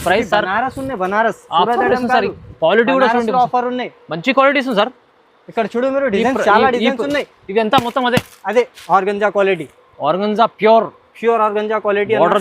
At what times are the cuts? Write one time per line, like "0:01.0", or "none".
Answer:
0:08.8

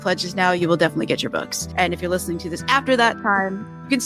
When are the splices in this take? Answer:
none

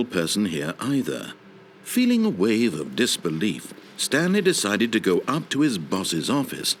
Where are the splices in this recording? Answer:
none

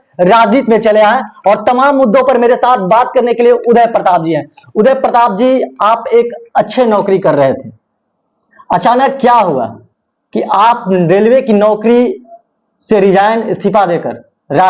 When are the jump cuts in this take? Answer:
none

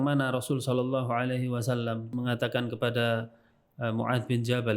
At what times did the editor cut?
0:02.1

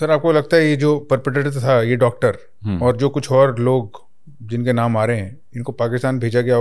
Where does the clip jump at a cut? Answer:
none

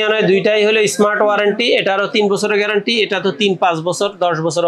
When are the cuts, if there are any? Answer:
none

